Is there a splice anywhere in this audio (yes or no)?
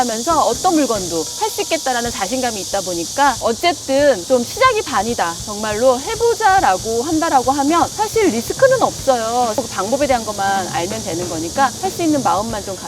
yes